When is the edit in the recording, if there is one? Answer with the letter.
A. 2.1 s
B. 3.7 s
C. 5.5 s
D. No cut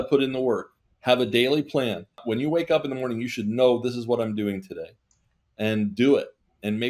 A